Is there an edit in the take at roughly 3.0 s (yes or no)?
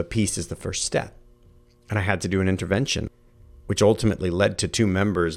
yes